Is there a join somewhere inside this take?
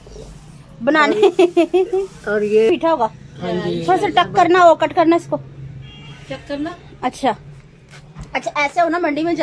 yes; 1 cut; at 2.7 s

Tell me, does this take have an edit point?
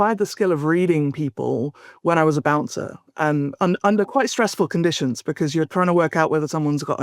no; 0 cuts

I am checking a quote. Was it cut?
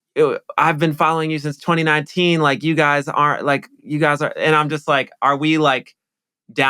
no; 0 cuts

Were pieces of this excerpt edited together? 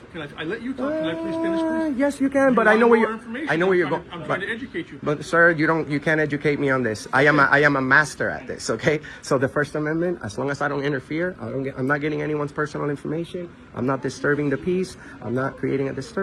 no; 0 cuts

